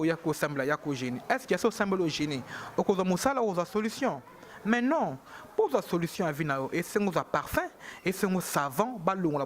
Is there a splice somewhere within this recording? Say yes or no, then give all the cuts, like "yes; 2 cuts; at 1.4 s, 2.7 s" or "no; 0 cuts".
no; 0 cuts